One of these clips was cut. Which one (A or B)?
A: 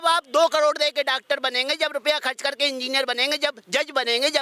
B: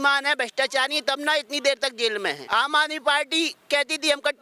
B